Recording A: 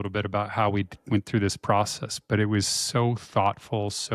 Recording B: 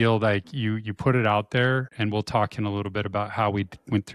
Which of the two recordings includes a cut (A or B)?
B